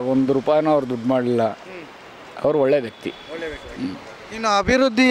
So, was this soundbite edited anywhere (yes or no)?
no